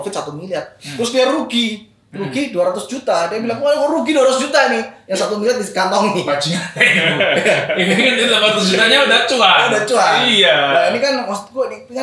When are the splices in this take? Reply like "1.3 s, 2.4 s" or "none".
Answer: none